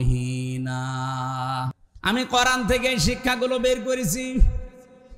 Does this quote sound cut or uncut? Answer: cut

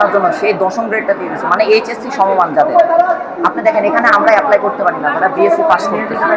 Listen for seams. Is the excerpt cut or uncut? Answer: uncut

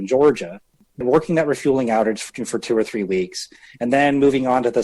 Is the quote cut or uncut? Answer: cut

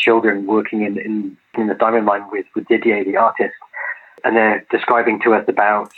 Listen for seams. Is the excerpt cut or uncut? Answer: uncut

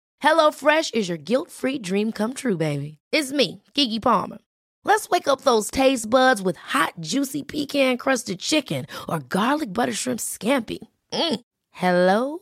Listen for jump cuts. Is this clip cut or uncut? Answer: uncut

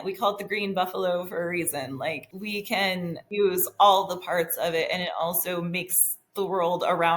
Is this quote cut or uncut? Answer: cut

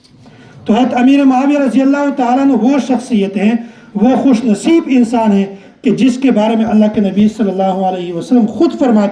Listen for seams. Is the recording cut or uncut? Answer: uncut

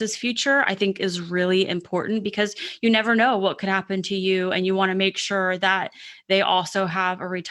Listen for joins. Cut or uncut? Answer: uncut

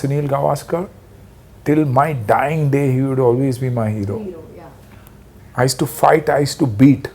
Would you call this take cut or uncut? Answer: uncut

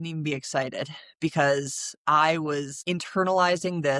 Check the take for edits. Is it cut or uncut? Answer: uncut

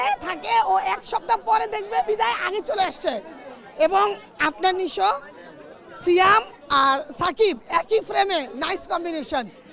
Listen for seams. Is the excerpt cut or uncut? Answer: uncut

